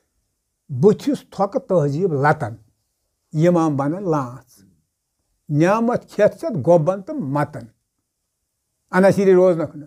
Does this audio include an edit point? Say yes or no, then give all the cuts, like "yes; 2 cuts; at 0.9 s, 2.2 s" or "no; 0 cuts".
no; 0 cuts